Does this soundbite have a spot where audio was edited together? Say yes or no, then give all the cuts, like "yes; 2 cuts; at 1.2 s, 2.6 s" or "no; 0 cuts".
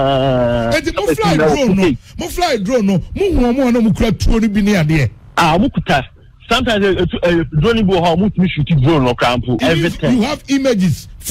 yes; 1 cut; at 9.6 s